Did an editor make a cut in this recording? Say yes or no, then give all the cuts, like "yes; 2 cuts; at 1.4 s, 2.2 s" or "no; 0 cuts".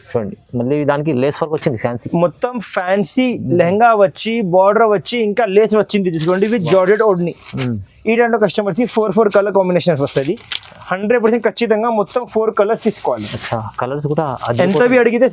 no; 0 cuts